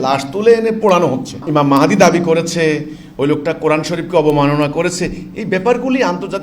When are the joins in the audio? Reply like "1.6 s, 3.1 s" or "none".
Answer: 1.4 s